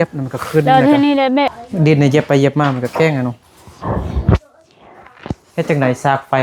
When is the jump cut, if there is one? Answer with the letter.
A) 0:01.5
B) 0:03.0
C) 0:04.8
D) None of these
A